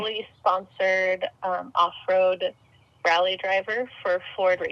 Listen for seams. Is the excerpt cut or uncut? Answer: uncut